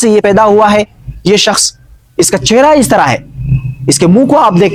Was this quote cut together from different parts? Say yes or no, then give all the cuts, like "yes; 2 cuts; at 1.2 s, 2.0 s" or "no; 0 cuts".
no; 0 cuts